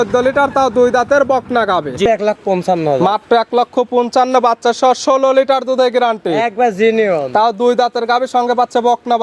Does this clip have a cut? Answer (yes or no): yes